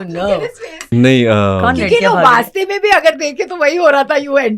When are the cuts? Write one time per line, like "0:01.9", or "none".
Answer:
0:00.9